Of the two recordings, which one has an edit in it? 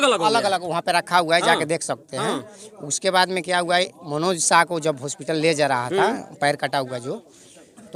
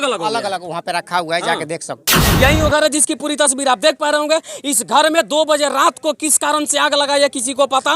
second; 1 cut; at 2.3 s

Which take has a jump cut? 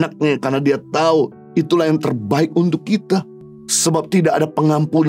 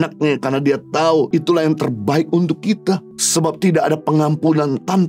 second; 2 cuts; at 1.3 s, 3.2 s

